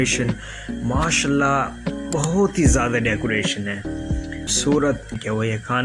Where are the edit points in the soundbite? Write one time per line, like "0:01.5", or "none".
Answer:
0:04.5